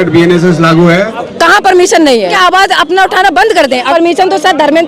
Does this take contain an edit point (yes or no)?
yes